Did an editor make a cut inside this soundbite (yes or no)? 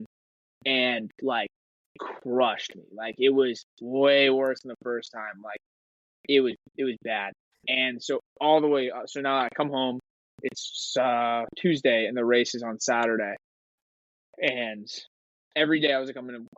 no